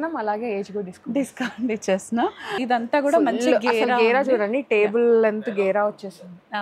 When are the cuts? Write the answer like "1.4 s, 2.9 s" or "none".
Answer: 2.5 s